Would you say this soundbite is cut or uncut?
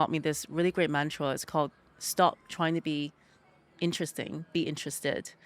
uncut